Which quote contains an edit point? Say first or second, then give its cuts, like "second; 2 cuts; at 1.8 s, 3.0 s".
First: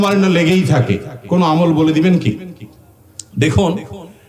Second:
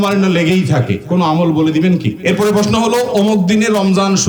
second; 2 cuts; at 1.0 s, 2.1 s